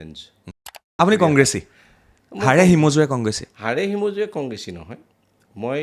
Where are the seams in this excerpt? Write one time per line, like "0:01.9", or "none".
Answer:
0:00.9